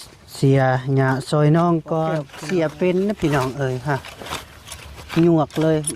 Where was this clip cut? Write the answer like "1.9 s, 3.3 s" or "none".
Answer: 2.3 s